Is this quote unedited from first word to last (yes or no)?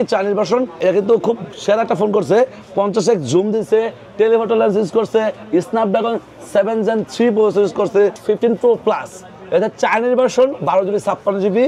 no